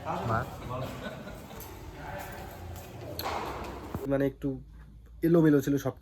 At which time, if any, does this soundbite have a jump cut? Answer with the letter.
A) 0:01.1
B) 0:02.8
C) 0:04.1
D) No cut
C